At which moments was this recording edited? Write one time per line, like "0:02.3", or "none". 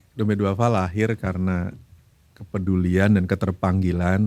none